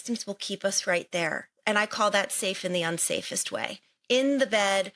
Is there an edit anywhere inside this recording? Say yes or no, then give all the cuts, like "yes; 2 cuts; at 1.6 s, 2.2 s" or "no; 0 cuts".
yes; 1 cut; at 1.5 s